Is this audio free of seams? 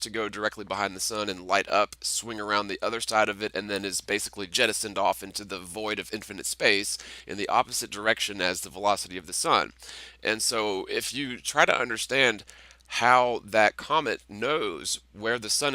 no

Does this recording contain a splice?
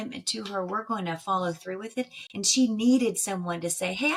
no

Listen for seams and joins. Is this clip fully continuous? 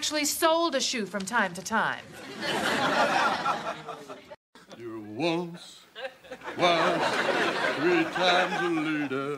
no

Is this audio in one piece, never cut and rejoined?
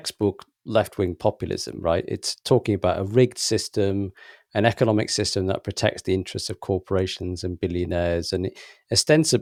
yes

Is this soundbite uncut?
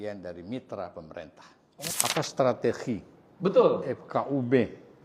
no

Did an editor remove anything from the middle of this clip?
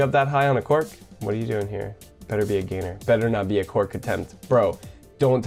no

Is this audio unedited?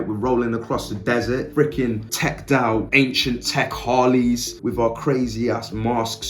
no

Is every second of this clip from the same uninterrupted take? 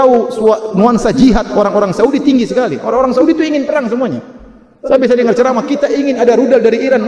yes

